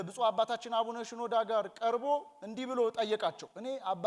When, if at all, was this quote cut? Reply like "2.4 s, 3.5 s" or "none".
none